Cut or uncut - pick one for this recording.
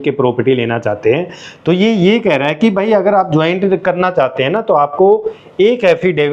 uncut